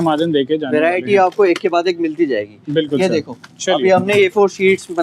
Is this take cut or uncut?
uncut